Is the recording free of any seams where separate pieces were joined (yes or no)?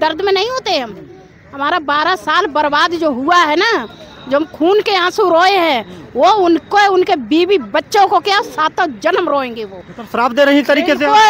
yes